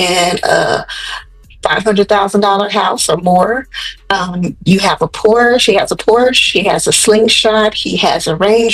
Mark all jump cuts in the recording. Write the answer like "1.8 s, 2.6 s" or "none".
none